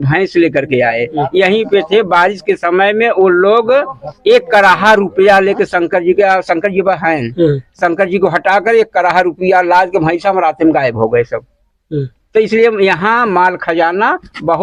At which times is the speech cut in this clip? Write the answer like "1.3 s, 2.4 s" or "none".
none